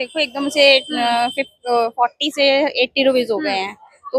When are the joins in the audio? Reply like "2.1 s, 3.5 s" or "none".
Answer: none